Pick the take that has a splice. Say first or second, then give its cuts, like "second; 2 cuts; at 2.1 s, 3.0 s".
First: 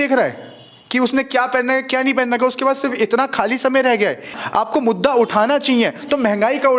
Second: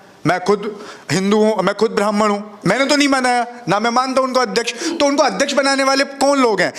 first; 1 cut; at 4.4 s